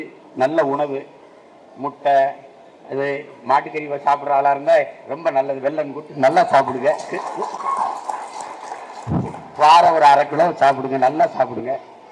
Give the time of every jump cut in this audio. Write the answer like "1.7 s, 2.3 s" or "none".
none